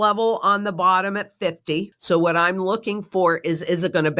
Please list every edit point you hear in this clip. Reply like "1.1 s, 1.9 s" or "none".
1.9 s